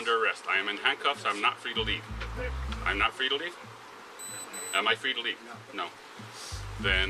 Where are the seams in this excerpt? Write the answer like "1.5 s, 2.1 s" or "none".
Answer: none